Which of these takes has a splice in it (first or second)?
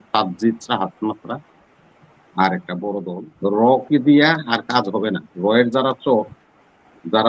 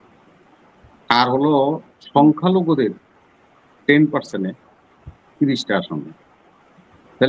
first